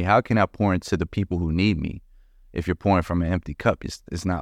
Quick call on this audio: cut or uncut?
uncut